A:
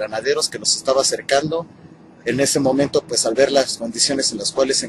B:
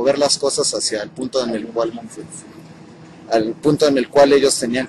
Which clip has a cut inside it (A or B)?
A